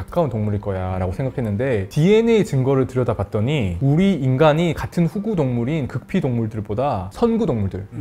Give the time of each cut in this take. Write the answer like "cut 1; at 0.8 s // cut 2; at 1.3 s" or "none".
none